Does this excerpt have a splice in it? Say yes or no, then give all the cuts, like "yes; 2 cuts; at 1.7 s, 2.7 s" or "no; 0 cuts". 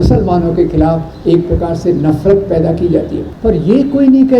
yes; 1 cut; at 3.2 s